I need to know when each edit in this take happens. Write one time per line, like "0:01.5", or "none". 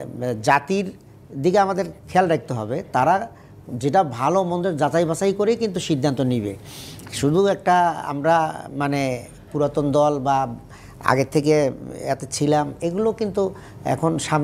none